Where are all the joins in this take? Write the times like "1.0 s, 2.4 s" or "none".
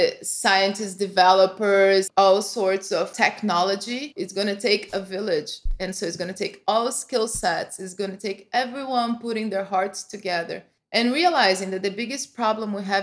2.1 s, 4.1 s